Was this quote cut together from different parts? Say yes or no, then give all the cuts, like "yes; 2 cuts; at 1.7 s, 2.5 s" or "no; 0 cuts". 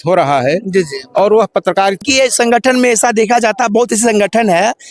yes; 1 cut; at 2.0 s